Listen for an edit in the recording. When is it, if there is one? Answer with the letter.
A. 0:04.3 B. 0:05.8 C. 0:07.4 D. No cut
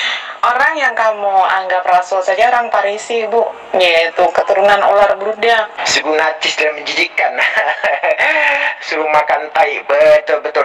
B